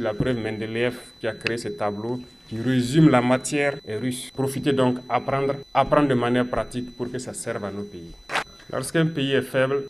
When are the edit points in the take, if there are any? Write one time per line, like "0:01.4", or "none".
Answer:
0:08.3